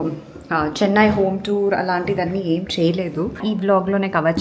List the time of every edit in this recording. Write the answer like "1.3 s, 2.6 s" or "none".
3.4 s